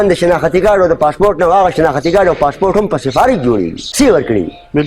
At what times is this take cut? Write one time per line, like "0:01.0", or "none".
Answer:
0:03.8

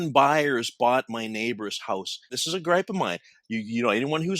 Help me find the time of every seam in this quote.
0:02.4

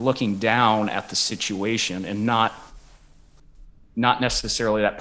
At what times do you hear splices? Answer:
none

